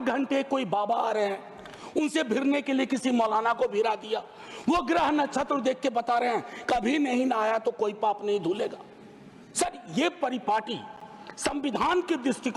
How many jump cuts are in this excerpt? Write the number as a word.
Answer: zero